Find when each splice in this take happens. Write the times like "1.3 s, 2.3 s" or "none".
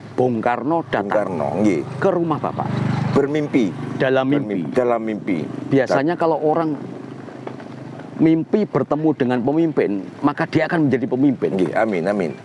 none